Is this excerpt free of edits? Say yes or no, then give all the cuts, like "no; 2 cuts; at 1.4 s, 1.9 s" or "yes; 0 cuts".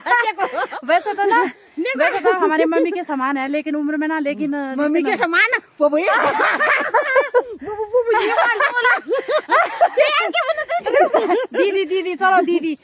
yes; 0 cuts